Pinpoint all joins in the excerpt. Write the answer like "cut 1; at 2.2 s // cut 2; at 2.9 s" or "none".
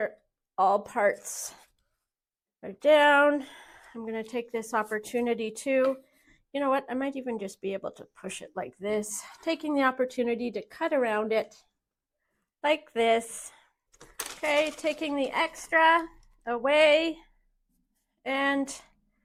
none